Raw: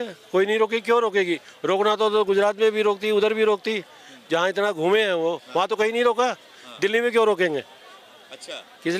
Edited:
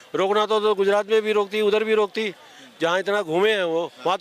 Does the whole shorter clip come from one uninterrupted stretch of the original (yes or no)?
yes